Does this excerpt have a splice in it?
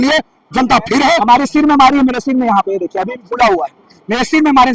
yes; 1 cut; at 1.2 s

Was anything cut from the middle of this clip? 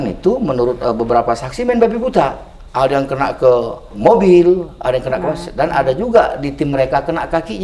yes; 1 cut; at 3.9 s

